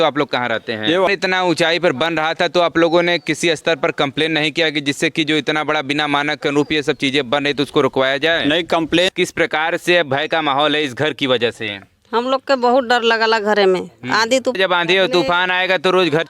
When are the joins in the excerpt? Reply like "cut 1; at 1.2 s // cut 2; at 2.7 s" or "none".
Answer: cut 1; at 1.0 s // cut 2; at 9.1 s // cut 3; at 14.6 s